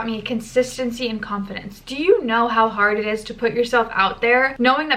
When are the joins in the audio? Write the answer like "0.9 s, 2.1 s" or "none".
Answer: none